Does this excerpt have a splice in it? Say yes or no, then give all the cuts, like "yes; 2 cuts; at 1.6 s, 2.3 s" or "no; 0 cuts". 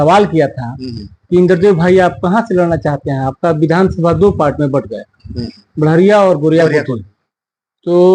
no; 0 cuts